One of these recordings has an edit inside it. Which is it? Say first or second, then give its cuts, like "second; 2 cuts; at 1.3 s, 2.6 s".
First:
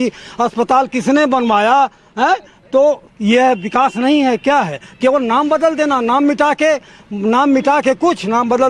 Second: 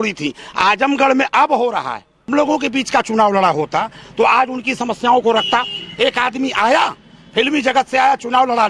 second; 1 cut; at 2.3 s